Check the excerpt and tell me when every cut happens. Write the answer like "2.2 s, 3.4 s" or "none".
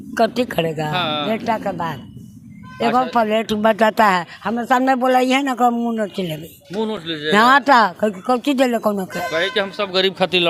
none